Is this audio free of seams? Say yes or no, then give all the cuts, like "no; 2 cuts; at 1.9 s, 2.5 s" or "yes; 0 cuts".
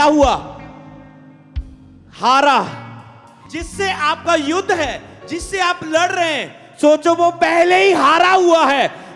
no; 1 cut; at 3.3 s